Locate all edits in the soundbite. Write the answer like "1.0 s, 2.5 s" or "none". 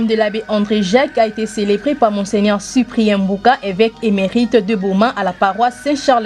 none